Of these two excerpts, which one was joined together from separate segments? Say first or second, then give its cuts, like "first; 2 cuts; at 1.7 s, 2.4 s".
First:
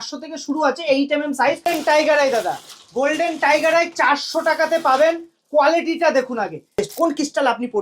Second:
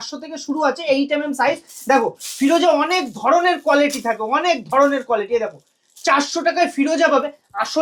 first; 2 cuts; at 1.6 s, 6.8 s